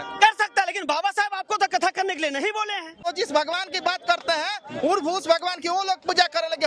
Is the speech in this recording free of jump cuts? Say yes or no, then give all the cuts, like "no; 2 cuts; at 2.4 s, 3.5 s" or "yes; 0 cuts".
no; 1 cut; at 3.1 s